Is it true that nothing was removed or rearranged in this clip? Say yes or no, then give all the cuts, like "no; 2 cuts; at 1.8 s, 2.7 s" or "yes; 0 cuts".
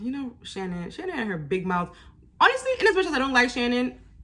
yes; 0 cuts